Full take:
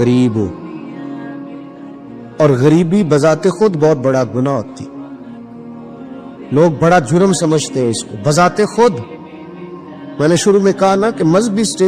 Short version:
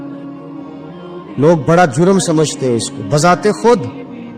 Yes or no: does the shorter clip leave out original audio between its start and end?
yes